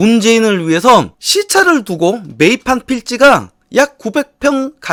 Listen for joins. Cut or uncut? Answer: uncut